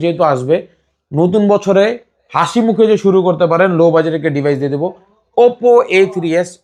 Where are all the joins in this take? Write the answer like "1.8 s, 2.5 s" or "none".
none